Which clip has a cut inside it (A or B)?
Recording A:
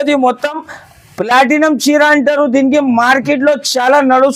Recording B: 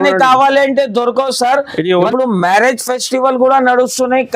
B